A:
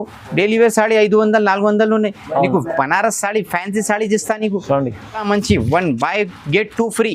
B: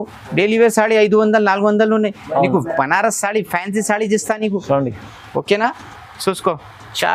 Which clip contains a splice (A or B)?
A